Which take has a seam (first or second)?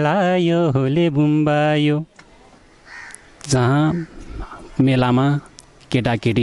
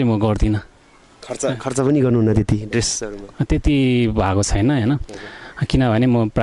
first